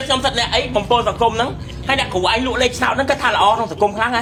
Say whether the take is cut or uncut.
uncut